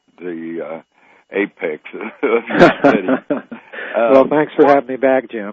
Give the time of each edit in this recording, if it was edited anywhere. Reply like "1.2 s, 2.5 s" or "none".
none